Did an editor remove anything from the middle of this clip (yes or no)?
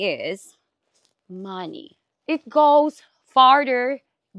yes